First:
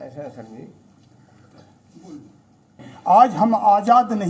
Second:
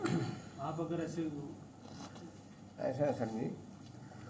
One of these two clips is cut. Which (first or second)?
first